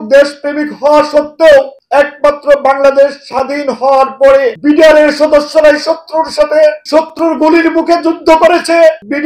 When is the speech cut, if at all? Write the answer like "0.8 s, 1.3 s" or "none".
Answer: none